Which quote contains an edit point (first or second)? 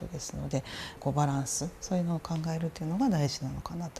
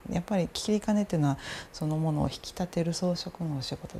first